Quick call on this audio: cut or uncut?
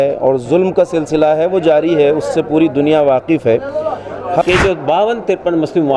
cut